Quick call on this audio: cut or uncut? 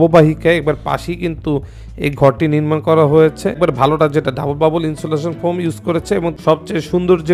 cut